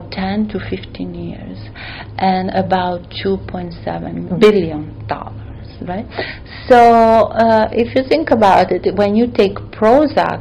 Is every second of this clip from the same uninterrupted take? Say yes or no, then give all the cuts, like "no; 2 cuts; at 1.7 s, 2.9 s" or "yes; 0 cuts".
no; 1 cut; at 4.2 s